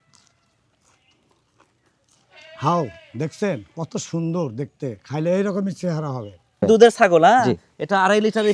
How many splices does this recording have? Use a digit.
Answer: 1